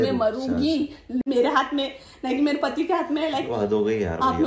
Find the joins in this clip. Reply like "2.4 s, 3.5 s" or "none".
1.2 s